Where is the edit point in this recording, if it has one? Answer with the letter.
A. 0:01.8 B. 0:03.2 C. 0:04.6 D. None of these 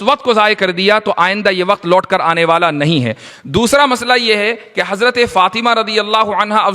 B